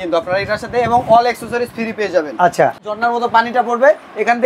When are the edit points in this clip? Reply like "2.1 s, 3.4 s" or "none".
2.9 s